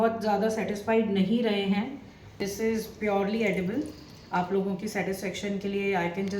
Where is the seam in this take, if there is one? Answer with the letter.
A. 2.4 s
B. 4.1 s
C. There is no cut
A